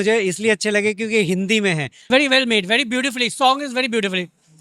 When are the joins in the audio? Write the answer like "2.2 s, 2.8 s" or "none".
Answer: 2.1 s

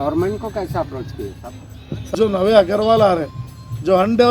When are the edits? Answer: 2.1 s

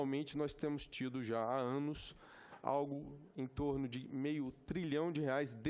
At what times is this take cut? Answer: none

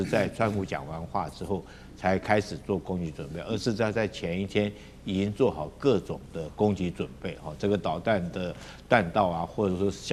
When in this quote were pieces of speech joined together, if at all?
none

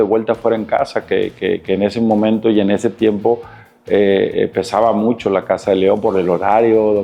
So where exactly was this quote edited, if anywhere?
none

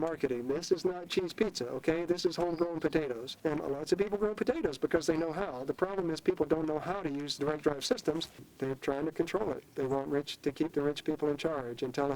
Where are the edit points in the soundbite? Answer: 3.3 s, 7.3 s, 8.4 s

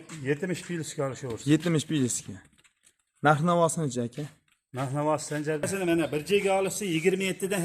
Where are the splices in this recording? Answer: 5.7 s

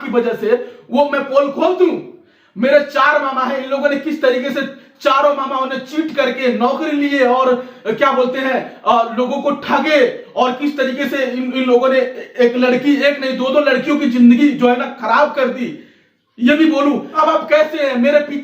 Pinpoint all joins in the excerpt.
17.2 s

